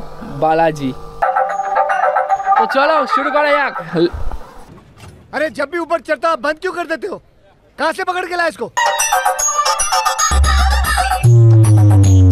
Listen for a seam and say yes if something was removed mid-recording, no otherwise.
yes